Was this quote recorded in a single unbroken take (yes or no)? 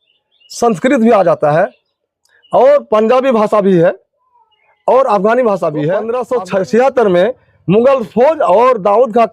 no